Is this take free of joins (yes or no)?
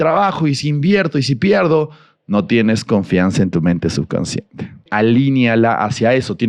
no